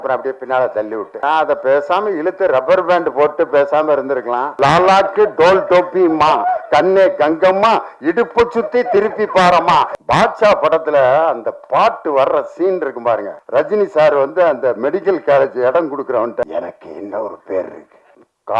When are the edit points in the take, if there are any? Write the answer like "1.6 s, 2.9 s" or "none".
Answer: 4.5 s, 10.0 s